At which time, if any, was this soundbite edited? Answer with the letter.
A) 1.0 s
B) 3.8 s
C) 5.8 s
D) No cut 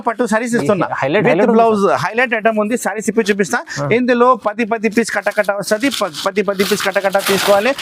D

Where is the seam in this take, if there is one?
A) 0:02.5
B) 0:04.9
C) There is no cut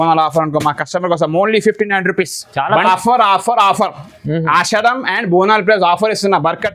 A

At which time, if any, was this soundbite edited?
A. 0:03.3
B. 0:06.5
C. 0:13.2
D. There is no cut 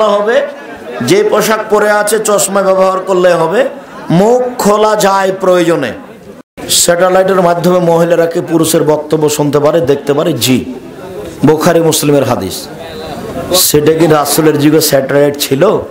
B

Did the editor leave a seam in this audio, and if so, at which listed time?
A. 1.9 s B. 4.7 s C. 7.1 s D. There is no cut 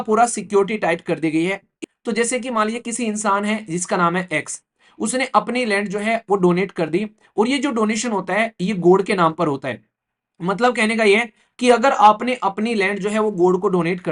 A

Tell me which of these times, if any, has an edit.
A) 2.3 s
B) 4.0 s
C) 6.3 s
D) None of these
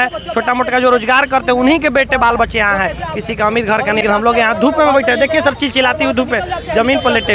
B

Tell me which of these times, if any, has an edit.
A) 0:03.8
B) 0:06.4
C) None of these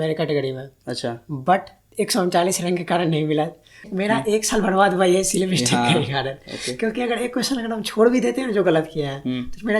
A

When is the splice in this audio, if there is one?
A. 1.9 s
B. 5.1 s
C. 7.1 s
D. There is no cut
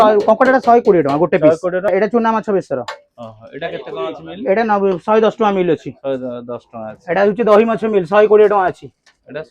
A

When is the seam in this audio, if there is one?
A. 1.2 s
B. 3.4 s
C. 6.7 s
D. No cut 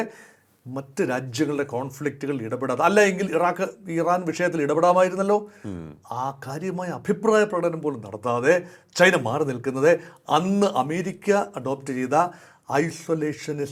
D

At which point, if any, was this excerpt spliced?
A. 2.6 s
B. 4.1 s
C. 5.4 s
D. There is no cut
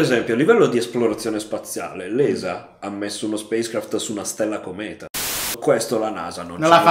C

